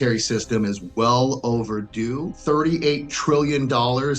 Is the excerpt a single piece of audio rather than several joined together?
no; 1 cut; at 2.3 s

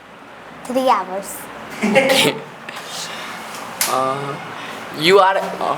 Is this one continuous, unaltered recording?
yes; 0 cuts

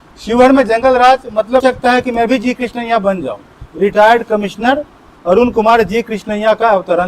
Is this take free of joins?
no; 1 cut; at 1.6 s

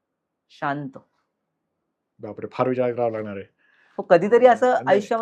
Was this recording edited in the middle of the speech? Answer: no; 0 cuts

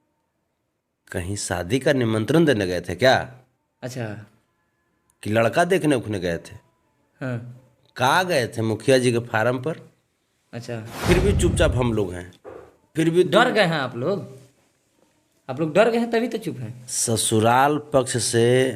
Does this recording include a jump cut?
yes; 1 cut; at 11.0 s

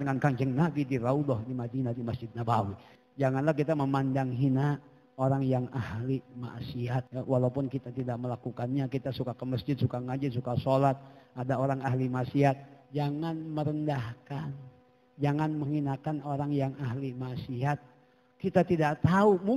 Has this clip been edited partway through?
yes; 2 cuts; at 2.9 s, 7.1 s

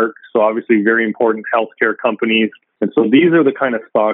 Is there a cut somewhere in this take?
yes; 1 cut; at 2.6 s

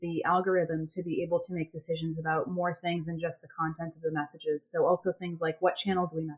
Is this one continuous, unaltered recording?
yes; 0 cuts

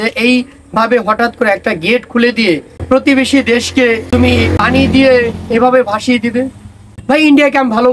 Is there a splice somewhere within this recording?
yes; 3 cuts; at 2.7 s, 4.2 s, 6.9 s

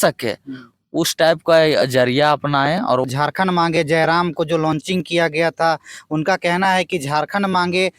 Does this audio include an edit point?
yes; 1 cut; at 3.1 s

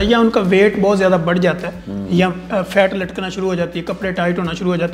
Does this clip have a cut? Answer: no; 0 cuts

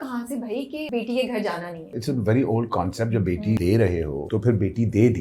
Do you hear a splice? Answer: yes; 3 cuts; at 0.9 s, 2.0 s, 3.8 s

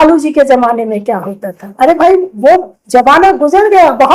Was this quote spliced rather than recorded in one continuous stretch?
no; 0 cuts

